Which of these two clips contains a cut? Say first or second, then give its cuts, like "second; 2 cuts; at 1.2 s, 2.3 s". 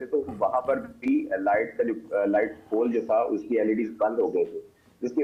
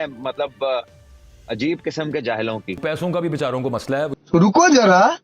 second; 2 cuts; at 2.8 s, 4.1 s